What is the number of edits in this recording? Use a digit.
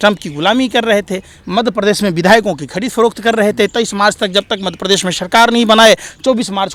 0